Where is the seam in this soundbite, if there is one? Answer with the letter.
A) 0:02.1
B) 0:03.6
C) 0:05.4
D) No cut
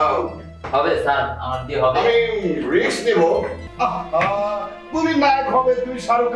B